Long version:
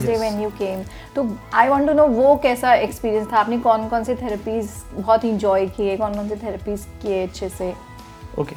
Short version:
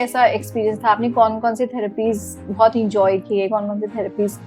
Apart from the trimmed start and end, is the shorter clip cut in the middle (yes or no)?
no